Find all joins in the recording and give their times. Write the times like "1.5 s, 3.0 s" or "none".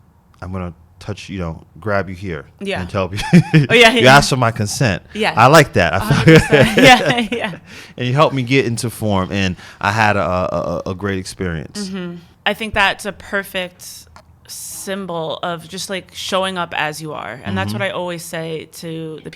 12.2 s